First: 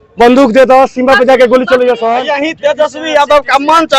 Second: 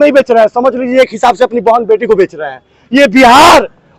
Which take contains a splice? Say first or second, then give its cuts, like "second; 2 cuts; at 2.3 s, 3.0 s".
first; 1 cut; at 2.2 s